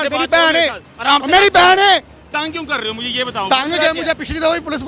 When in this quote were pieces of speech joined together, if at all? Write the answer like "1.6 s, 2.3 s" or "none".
2.2 s